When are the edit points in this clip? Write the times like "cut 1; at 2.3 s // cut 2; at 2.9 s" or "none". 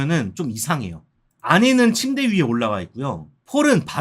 cut 1; at 1.3 s